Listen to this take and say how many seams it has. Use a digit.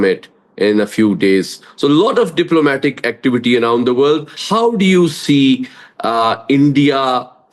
1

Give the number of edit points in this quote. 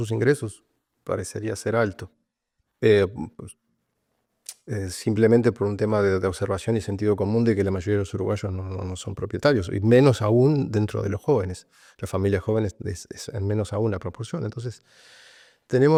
0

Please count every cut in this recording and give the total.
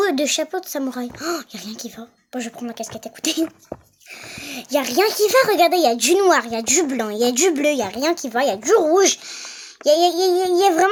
0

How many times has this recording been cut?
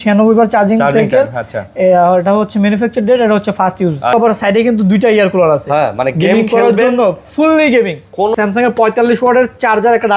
2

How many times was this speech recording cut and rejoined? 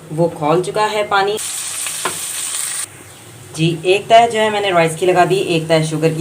1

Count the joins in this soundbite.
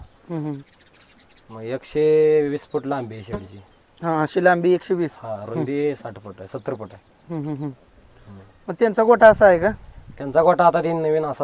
0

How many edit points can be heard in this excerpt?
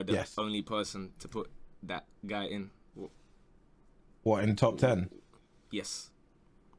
0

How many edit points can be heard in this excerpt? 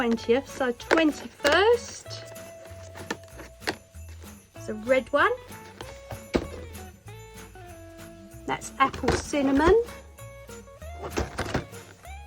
2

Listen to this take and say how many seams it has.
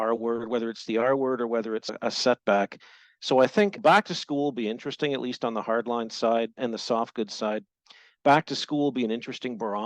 2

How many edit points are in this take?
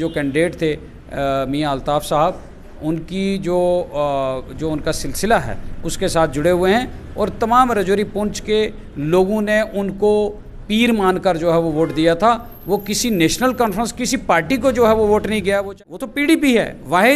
1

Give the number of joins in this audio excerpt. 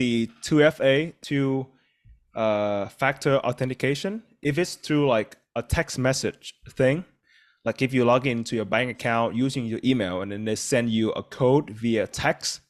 2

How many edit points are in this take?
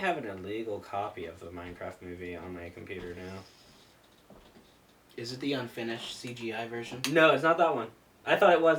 0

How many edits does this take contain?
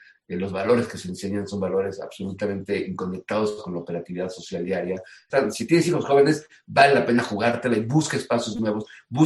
1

